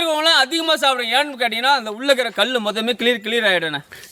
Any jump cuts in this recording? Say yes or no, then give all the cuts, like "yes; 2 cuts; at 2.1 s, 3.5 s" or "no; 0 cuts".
no; 0 cuts